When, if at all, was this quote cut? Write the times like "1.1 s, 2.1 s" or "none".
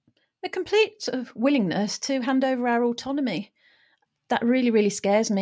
3.9 s